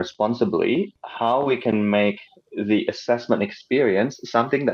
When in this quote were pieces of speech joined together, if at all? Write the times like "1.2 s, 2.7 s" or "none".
0.9 s